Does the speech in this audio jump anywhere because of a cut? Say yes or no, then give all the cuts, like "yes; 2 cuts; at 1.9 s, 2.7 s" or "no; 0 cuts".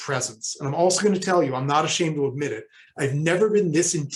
no; 0 cuts